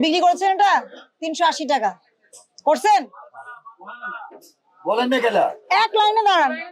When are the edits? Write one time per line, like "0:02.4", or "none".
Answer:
0:05.6